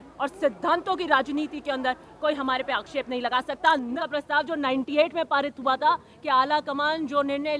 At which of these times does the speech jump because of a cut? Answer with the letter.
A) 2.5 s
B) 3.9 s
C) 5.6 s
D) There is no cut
B